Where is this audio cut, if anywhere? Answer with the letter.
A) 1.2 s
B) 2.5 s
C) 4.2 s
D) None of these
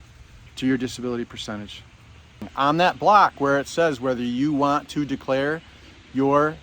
B